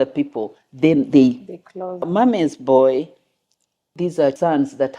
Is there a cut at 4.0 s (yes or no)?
yes